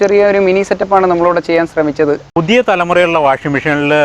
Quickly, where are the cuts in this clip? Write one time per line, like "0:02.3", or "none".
0:02.2

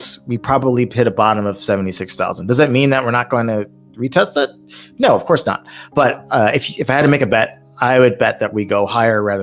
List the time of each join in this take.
none

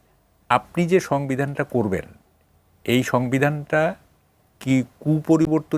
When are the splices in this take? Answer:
none

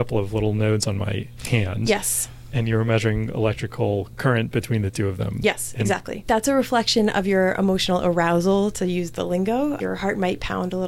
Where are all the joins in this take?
0:06.1
0:09.8

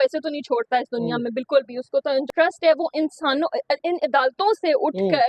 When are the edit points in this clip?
0:02.3

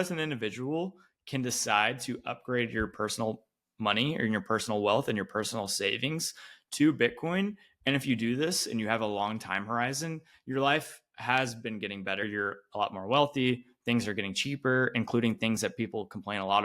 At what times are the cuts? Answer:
0:12.2

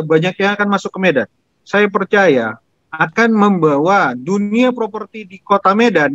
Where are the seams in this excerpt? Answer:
0:01.6

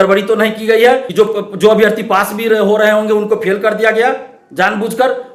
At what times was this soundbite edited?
0:01.1

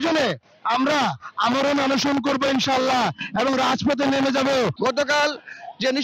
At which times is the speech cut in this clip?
0:04.7

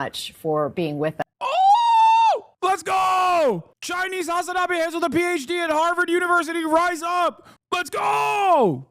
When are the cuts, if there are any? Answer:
0:03.7
0:07.5

